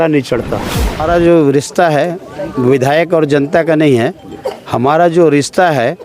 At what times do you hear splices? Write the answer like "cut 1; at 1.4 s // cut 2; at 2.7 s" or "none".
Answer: cut 1; at 1.0 s